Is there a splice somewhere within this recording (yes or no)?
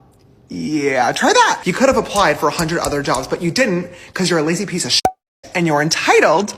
yes